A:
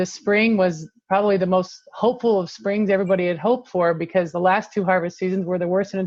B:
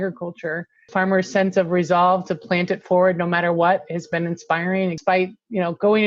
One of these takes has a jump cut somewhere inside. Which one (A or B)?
B